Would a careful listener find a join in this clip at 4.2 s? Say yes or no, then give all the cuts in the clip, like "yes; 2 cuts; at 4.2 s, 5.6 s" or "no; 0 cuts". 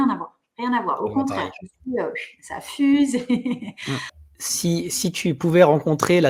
yes; 1 cut; at 4.2 s